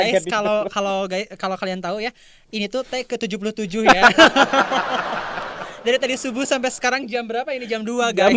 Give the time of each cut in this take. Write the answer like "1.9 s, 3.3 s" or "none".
none